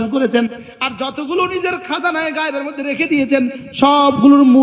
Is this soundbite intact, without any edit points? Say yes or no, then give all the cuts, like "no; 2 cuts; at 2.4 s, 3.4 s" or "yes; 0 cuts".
yes; 0 cuts